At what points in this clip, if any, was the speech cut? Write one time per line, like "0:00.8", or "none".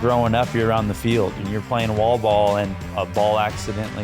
0:01.4
0:02.9